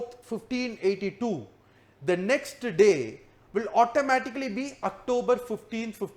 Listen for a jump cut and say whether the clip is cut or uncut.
uncut